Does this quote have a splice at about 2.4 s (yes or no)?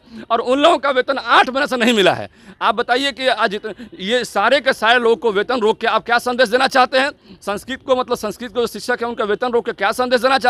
no